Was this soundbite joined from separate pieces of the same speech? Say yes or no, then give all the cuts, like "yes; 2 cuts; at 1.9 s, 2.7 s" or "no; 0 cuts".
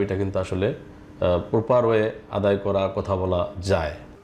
no; 0 cuts